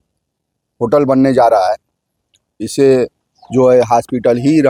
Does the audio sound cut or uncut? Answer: uncut